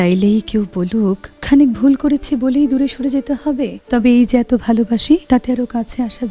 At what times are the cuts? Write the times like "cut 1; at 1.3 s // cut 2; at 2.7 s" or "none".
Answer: cut 1; at 1.3 s // cut 2; at 3.7 s // cut 3; at 5.2 s